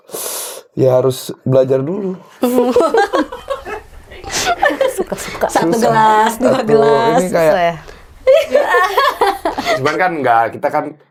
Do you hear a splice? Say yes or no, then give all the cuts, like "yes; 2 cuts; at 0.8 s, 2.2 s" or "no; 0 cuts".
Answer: no; 0 cuts